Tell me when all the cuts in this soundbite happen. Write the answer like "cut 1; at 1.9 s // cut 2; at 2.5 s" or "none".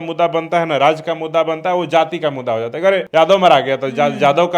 cut 1; at 3.1 s